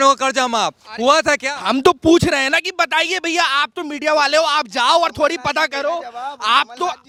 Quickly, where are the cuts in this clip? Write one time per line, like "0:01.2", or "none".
none

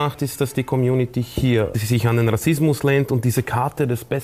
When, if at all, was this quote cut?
0:01.8

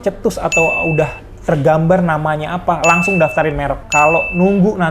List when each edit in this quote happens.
0:03.8

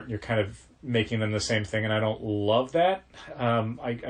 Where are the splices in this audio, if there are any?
none

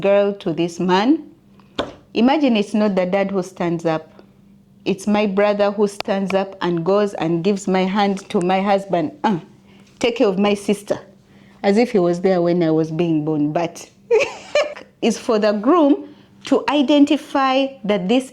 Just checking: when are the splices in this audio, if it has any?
0:14.7

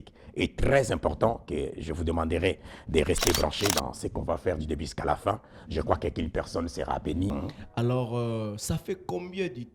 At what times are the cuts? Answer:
0:07.3

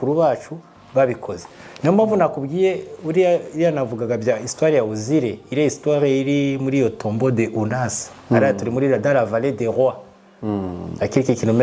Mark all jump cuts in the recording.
none

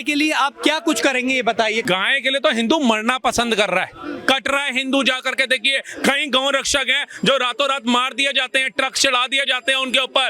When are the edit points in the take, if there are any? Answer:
0:01.8

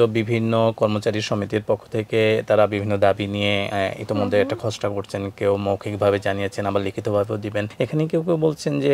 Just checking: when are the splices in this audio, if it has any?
0:07.7

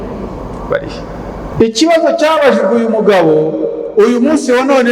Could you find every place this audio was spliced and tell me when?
0:01.5

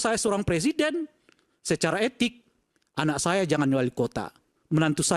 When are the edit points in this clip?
none

